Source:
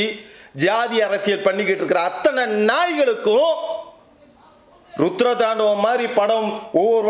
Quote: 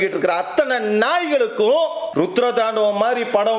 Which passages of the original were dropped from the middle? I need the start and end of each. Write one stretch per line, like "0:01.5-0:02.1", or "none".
0:03.7-0:04.9